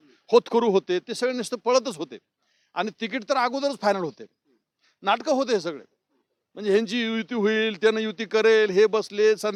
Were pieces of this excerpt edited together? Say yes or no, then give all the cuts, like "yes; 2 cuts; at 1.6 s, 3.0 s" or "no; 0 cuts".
no; 0 cuts